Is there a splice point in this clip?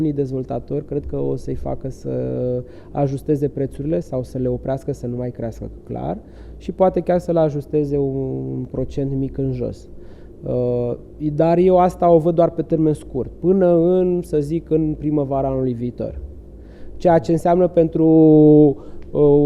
no; 0 cuts

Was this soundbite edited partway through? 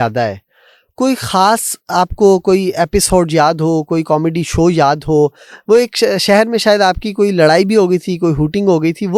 no; 0 cuts

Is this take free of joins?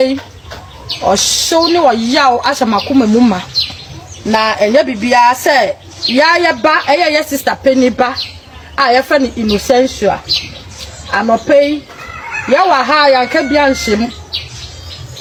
yes; 0 cuts

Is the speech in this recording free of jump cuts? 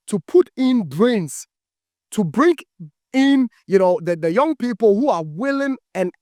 yes; 0 cuts

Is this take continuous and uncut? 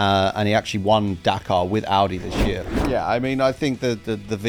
no; 1 cut; at 2.7 s

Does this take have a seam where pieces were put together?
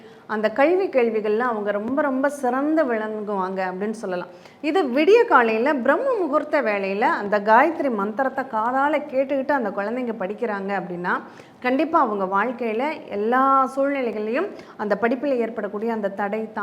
no; 0 cuts

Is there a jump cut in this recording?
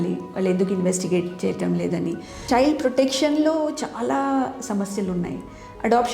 yes; 1 cut; at 2.4 s

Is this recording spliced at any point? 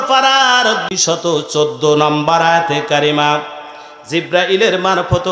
yes; 1 cut; at 1.0 s

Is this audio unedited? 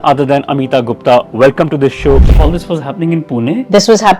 no; 1 cut; at 2.2 s

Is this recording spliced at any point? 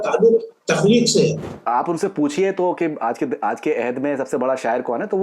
yes; 1 cut; at 1.5 s

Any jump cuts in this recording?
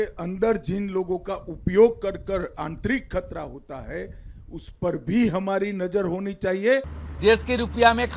yes; 1 cut; at 7.0 s

